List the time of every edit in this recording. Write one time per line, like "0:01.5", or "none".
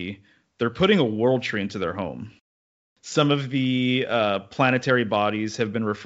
0:02.6